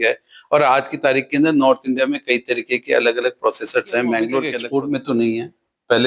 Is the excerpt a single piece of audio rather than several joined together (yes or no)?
no